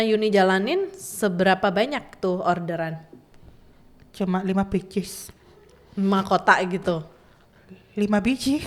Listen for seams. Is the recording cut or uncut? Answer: uncut